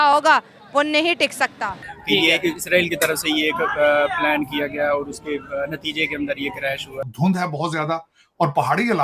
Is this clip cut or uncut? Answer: cut